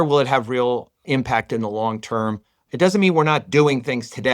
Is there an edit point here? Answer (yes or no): yes